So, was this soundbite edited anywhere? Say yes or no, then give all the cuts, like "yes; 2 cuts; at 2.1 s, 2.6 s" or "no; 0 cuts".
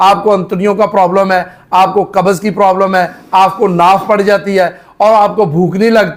no; 0 cuts